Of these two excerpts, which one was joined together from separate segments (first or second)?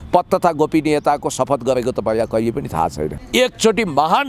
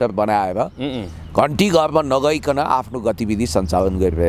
first